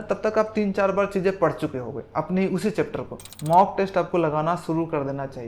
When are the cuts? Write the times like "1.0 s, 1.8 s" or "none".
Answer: 3.2 s